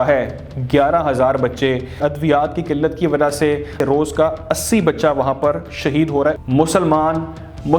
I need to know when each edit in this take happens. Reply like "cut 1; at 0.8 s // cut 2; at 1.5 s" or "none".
cut 1; at 2.0 s // cut 2; at 3.8 s // cut 3; at 6.4 s